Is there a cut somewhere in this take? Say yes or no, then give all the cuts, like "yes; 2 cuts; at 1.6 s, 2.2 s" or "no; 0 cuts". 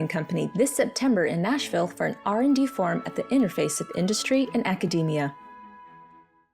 yes; 1 cut; at 5.3 s